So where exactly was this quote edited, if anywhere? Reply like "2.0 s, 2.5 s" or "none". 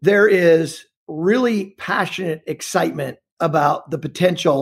none